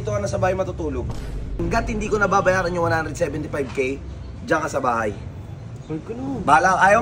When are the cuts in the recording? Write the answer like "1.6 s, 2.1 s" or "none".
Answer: 1.5 s

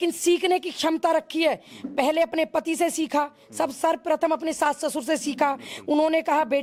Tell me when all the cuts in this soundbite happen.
none

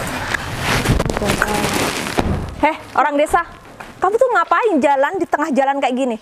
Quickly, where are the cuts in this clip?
none

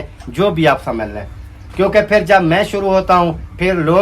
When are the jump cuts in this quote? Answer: none

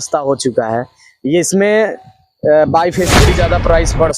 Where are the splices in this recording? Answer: 3.2 s

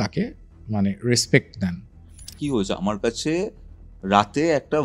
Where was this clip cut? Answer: 2.4 s

